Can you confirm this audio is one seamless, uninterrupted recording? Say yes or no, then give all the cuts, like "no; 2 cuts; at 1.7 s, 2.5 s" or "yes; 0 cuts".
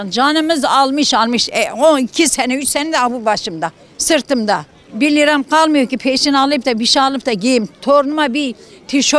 yes; 0 cuts